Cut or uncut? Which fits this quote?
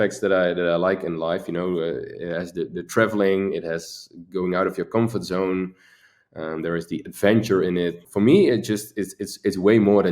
cut